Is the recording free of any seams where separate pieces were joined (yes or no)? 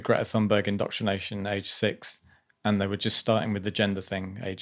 yes